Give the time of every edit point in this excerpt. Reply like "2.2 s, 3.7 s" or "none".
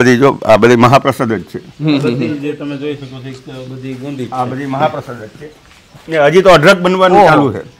none